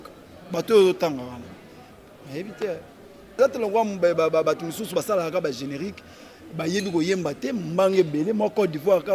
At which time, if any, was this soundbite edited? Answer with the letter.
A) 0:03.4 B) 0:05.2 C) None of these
A